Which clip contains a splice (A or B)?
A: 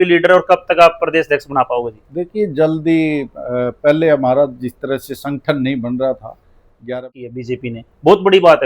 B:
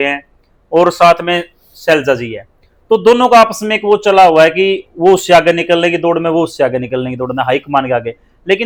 A